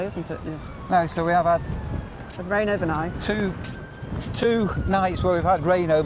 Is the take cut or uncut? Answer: uncut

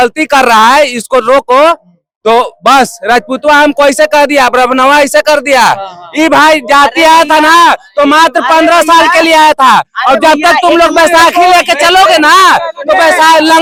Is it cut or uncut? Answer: uncut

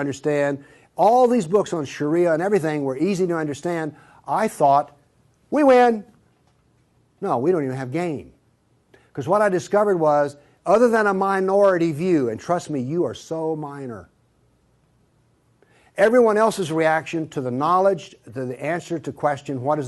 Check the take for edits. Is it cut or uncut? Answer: cut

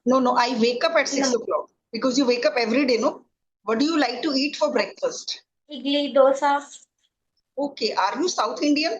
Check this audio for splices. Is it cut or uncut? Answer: cut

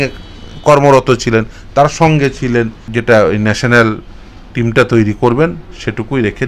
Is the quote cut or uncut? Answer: cut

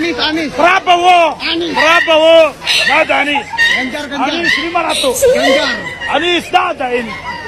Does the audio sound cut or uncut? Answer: uncut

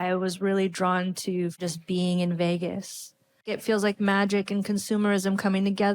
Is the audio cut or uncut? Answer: cut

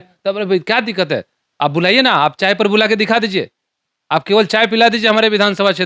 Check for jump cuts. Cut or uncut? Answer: uncut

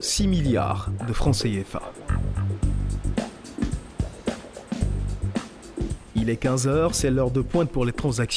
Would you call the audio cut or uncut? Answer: uncut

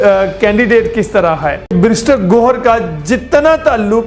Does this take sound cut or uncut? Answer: cut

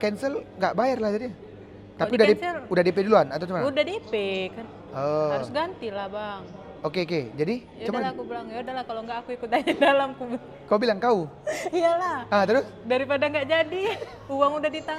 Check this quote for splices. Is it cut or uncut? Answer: uncut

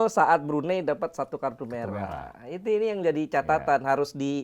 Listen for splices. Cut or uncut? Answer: uncut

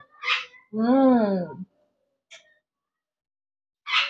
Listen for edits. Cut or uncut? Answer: uncut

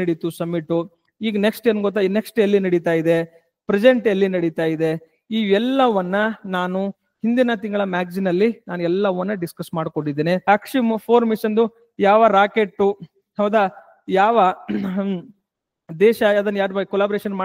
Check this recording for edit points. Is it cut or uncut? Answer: cut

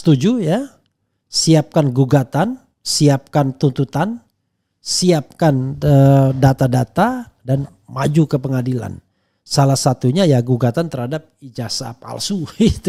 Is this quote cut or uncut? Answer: uncut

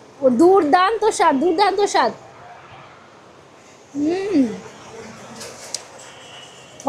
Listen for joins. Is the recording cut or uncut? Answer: uncut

